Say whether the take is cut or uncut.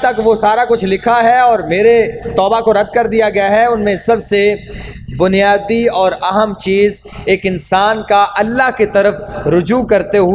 uncut